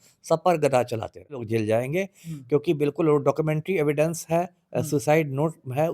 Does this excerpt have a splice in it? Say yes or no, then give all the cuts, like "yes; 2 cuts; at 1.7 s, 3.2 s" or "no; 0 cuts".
yes; 1 cut; at 1.4 s